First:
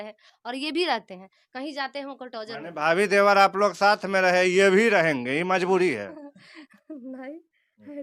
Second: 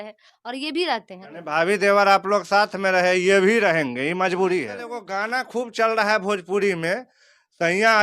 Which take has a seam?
second; 2 cuts; at 1.3 s, 5.1 s

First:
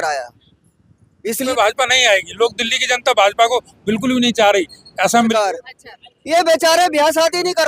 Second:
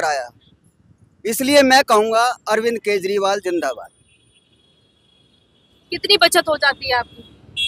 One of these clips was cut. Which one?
first; 2 cuts; at 1.5 s, 5.1 s

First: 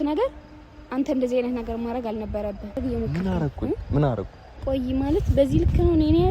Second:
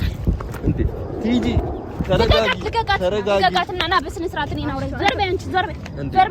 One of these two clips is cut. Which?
first; 1 cut; at 2.8 s

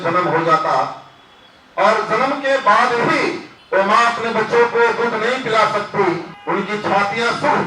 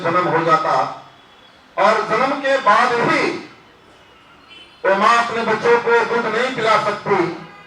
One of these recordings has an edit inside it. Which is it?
first; 2 cuts; at 3.5 s, 6.3 s

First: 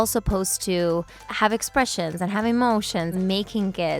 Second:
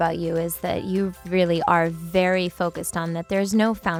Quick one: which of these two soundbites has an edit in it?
first; 2 cuts; at 1.2 s, 3.1 s

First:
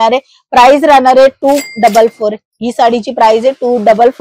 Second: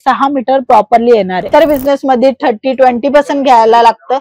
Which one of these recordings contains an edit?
second; 1 cut; at 1.4 s

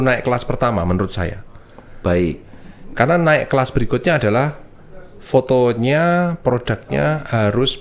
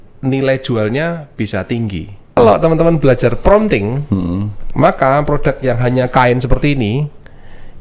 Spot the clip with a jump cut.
second; 1 cut; at 2.4 s

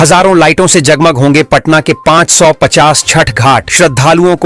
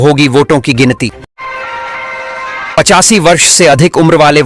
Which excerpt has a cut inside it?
second; 2 cuts; at 1.3 s, 2.8 s

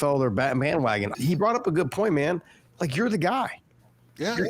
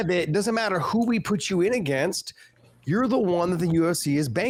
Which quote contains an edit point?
first; 1 cut; at 1.1 s

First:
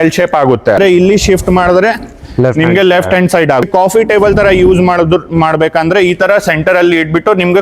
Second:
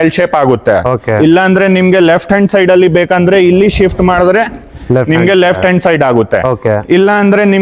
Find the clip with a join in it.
first; 2 cuts; at 0.8 s, 3.6 s

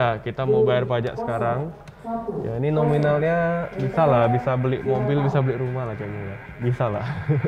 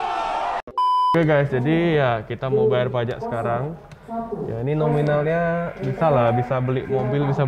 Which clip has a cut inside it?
second; 1 cut; at 1.1 s

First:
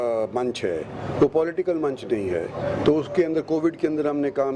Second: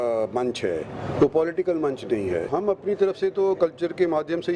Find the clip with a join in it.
second; 1 cut; at 2.5 s

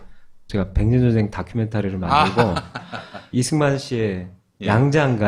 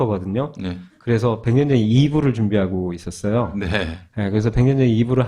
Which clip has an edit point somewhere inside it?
second; 1 cut; at 1.8 s

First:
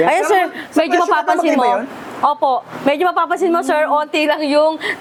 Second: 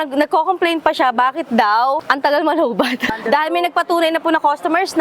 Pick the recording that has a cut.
second; 2 cuts; at 2.0 s, 3.2 s

